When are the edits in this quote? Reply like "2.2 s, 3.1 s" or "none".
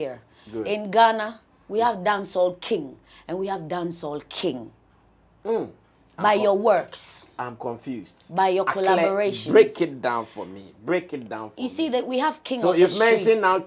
none